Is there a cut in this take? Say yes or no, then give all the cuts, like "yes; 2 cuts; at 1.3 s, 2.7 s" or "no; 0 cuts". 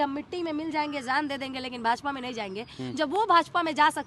no; 0 cuts